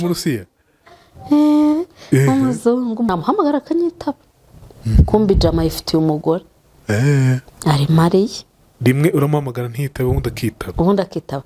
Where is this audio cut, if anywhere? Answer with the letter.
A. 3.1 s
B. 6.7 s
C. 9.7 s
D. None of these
A